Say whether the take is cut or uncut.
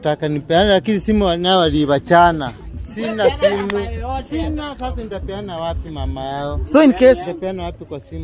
uncut